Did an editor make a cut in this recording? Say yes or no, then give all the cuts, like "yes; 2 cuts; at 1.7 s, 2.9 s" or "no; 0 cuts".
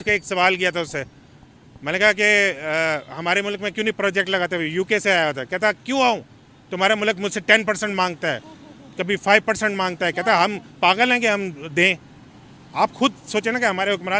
no; 0 cuts